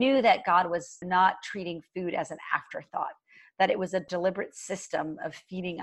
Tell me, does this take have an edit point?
yes; 2 cuts; at 0.9 s, 4.1 s

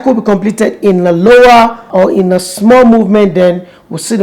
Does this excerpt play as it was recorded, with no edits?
no; 1 cut; at 1.9 s

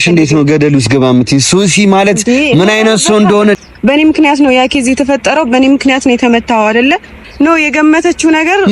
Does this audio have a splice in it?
yes; 2 cuts; at 3.6 s, 7.3 s

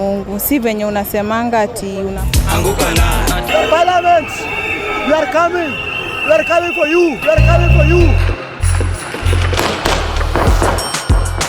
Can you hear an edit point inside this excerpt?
yes; 1 cut; at 2.2 s

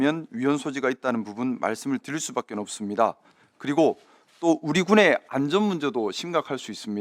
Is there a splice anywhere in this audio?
no; 0 cuts

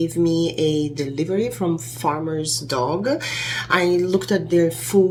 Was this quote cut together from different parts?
no; 0 cuts

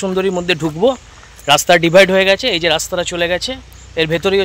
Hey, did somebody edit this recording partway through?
no; 0 cuts

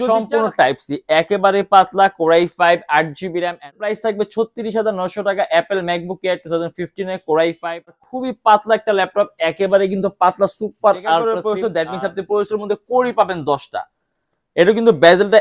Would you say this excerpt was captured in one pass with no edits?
no; 3 cuts; at 3.9 s, 7.9 s, 11.3 s

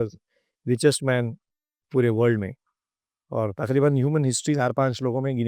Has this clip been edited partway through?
yes; 1 cut; at 4.6 s

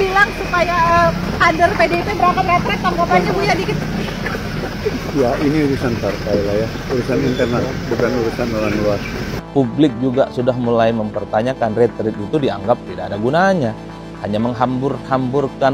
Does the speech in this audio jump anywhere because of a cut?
yes; 1 cut; at 9.3 s

